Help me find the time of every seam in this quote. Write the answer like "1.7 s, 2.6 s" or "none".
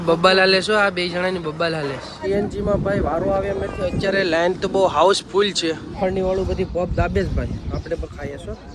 2.2 s, 5.9 s

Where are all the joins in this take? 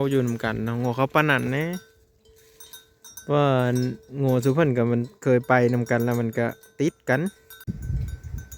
7.5 s

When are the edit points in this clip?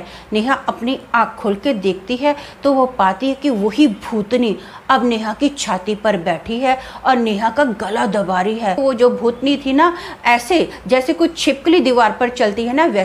8.8 s

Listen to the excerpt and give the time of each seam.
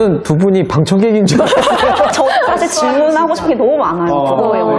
none

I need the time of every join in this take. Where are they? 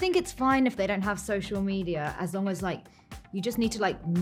none

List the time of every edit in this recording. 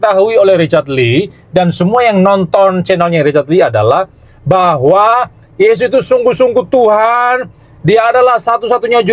none

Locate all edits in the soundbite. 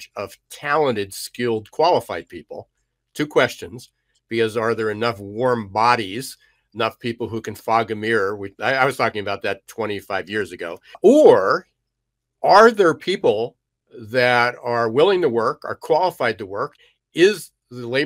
11.0 s, 16.7 s

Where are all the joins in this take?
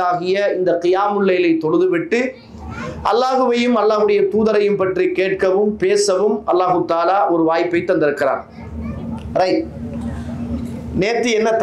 none

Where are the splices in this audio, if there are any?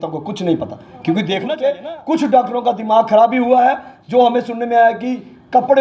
1.5 s

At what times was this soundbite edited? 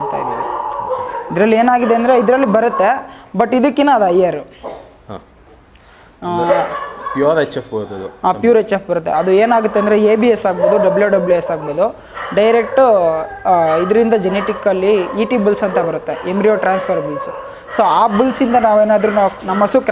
none

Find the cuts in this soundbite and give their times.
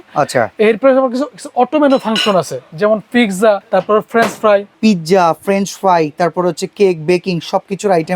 3.6 s, 4.7 s

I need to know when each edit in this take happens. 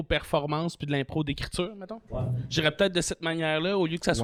none

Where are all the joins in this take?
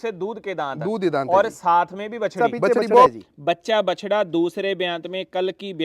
3.1 s

